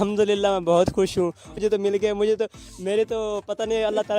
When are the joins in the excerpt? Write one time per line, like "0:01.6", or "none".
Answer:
0:01.2